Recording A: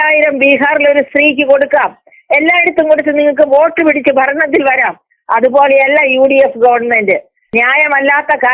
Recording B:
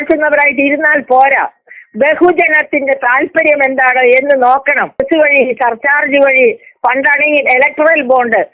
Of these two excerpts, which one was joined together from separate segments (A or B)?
B